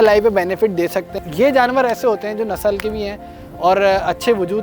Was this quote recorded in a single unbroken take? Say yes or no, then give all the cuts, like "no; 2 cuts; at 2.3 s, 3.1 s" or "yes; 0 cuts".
no; 1 cut; at 1.1 s